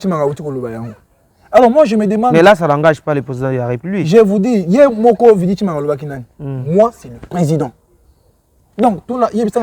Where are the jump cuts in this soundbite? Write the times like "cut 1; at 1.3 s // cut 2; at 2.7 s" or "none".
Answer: none

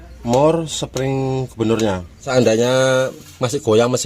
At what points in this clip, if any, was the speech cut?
cut 1; at 2.3 s

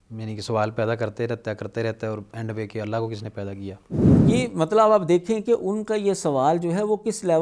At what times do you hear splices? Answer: none

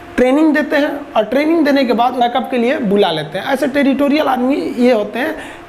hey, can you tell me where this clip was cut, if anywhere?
cut 1; at 2.2 s

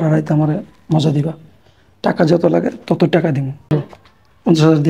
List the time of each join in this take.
cut 1; at 3.7 s

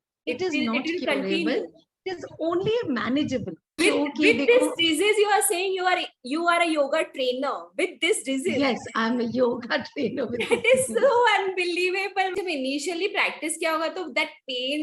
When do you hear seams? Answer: cut 1; at 3.8 s // cut 2; at 12.3 s

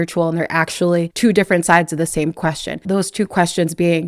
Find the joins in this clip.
cut 1; at 1.1 s // cut 2; at 2.8 s

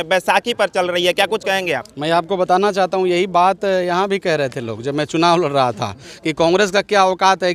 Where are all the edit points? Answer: none

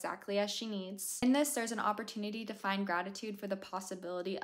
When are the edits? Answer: cut 1; at 1.1 s

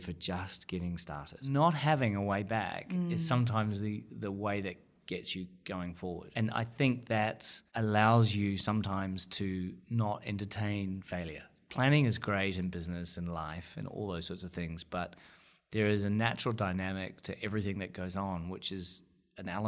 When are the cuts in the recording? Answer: cut 1; at 1.4 s // cut 2; at 11.5 s

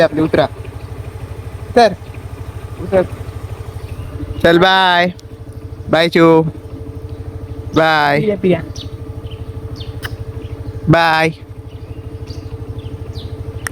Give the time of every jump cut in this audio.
none

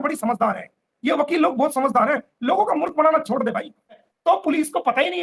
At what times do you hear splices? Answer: cut 1; at 4.1 s

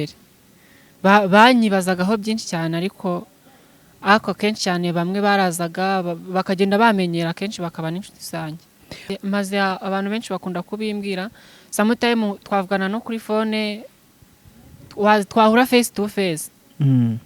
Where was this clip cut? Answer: cut 1; at 9.0 s

